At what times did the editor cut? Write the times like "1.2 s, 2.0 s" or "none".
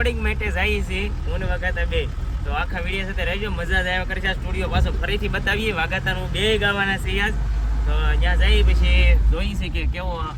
none